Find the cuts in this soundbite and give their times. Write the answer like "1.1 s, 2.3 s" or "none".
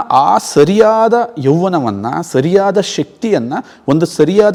none